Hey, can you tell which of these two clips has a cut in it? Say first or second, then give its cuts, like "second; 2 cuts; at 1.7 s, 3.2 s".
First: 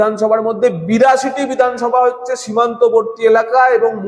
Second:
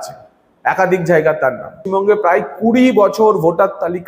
second; 1 cut; at 1.7 s